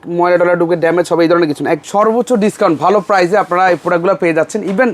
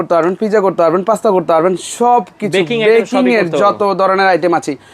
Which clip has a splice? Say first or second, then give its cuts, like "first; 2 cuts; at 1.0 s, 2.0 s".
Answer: first; 1 cut; at 1.8 s